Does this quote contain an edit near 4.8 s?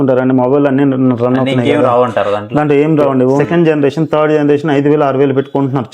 no; 1 cut; at 3.4 s

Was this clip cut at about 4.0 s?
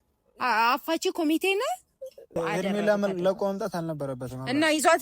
no; 1 cut; at 2.4 s

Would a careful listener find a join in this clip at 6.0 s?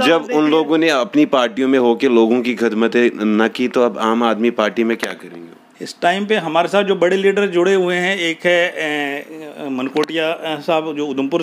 no; 0 cuts

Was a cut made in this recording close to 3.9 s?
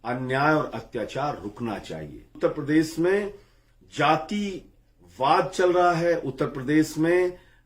no; 1 cut; at 2.4 s

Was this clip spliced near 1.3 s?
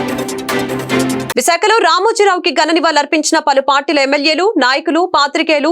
yes; 1 cut; at 1.3 s

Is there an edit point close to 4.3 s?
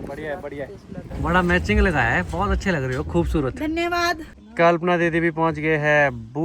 yes; 2 cuts; at 1.1 s, 4.3 s

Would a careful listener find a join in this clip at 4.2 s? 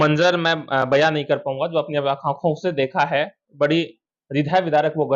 no; 0 cuts

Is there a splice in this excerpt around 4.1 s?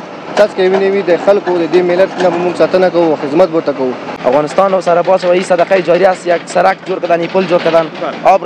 yes; 1 cut; at 4.1 s

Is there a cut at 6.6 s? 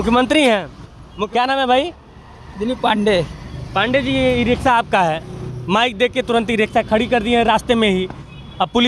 no; 1 cut; at 1.2 s

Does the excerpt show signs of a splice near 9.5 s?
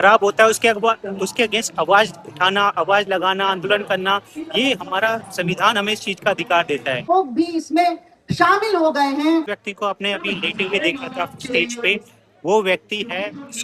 yes; 2 cuts; at 7.1 s, 9.5 s

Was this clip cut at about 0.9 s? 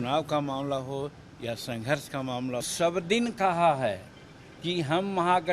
no; 1 cut; at 2.7 s

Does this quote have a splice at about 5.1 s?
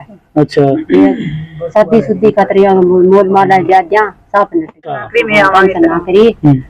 yes; 1 cut; at 5.1 s

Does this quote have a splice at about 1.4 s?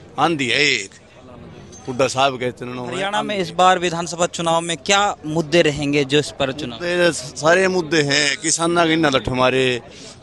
no; 1 cut; at 3.0 s

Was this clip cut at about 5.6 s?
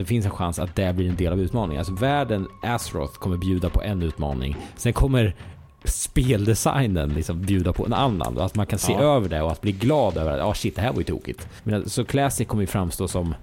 no; 1 cut; at 11.5 s

